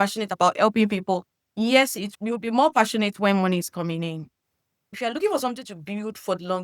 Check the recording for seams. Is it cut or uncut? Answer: cut